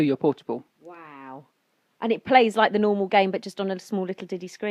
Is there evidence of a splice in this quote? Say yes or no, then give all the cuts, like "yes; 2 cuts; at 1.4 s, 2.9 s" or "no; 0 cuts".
no; 0 cuts